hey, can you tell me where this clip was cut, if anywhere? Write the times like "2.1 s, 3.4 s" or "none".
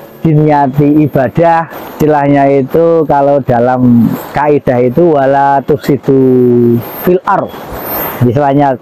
none